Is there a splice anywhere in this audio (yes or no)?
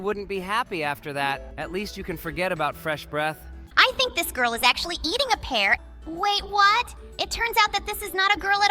yes